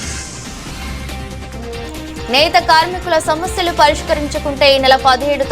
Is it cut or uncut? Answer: uncut